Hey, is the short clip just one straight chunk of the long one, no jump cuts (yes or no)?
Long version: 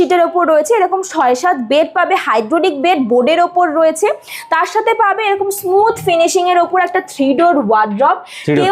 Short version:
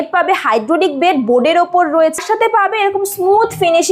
no